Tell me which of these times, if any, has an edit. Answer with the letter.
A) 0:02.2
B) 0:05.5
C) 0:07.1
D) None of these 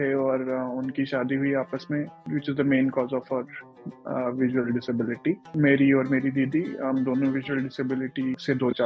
A